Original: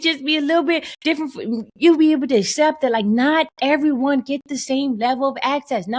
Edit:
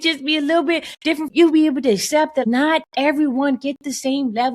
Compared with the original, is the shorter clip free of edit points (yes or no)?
no